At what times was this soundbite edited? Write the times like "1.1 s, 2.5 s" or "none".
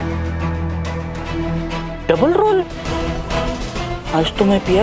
1.3 s, 2.9 s